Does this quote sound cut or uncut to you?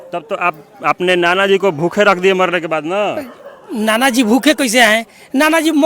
uncut